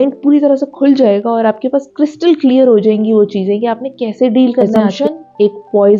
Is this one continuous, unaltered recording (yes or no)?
no